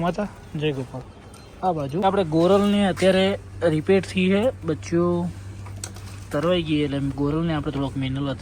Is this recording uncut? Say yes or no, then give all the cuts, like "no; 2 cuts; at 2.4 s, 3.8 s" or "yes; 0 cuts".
no; 1 cut; at 2.0 s